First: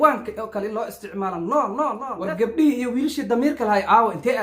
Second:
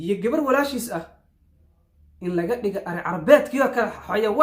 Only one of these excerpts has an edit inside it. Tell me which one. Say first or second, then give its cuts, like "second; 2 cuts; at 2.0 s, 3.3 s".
first; 1 cut; at 2.1 s